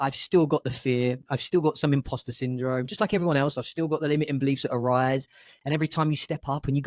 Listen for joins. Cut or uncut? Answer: uncut